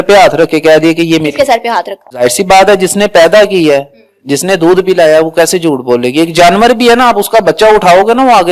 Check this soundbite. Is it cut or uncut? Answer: cut